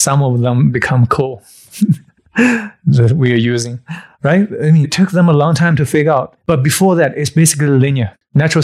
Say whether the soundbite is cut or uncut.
uncut